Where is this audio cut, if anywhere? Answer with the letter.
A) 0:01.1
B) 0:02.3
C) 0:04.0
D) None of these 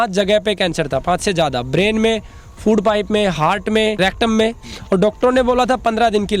C